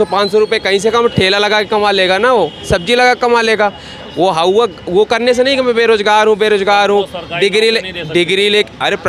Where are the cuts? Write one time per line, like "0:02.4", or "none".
none

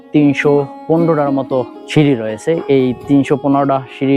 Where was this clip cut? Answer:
0:01.8

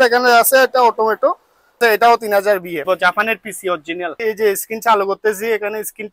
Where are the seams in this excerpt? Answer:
0:01.8
0:02.8
0:04.1

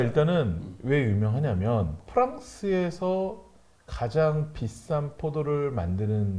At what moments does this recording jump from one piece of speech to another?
0:02.0

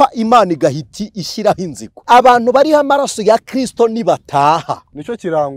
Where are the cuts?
0:01.9

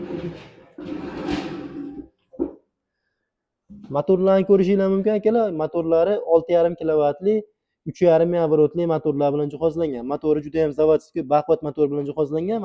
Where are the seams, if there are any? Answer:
none

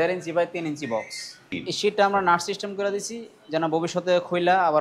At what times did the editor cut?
0:01.5

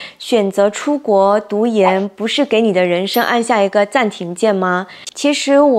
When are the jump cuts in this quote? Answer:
0:04.9

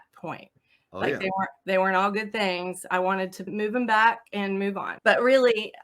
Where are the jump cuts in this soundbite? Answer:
0:03.5
0:04.9

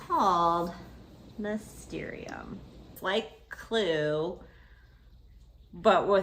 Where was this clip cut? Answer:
0:03.0

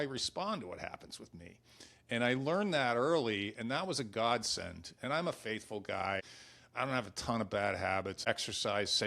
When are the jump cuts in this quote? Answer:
0:06.2
0:08.2

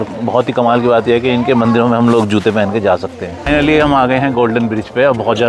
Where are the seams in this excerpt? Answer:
0:03.5

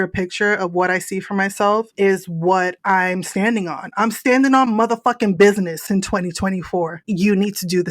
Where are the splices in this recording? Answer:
0:07.0

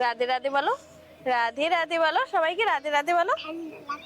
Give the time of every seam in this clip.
none

